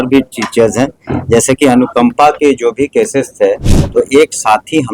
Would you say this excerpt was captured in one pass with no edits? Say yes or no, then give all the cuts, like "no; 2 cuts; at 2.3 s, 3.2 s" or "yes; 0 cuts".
no; 1 cut; at 3.7 s